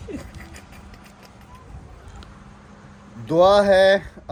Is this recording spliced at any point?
no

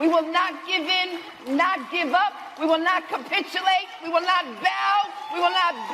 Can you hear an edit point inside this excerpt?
no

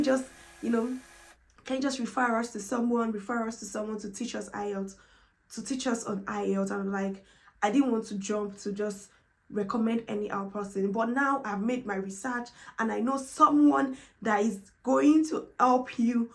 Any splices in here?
no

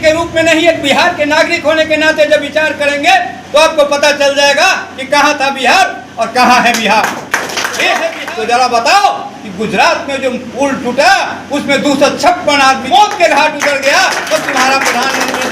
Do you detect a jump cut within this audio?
yes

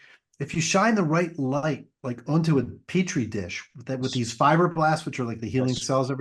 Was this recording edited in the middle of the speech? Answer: no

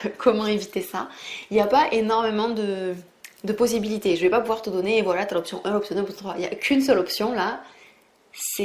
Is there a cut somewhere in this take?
no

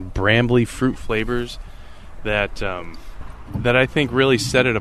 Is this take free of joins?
yes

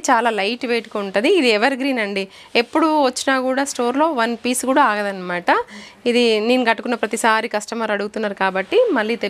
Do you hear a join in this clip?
no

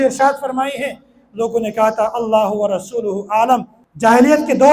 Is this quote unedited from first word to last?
no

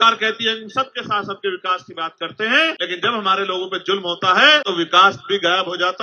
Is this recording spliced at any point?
yes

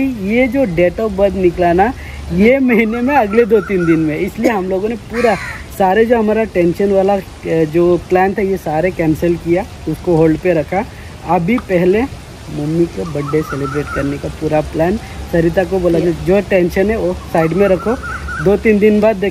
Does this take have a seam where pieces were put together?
no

